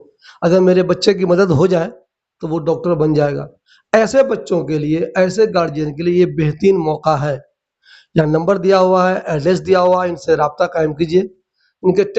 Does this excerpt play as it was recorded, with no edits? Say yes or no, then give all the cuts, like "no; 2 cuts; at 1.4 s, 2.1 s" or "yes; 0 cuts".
yes; 0 cuts